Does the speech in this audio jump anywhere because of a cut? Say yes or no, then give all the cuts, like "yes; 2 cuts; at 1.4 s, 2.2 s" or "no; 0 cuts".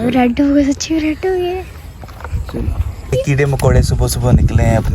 yes; 1 cut; at 3.1 s